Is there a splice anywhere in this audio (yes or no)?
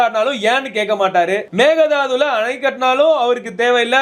yes